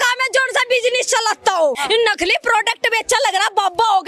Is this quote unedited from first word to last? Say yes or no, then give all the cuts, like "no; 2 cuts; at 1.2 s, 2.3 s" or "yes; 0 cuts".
no; 1 cut; at 1.8 s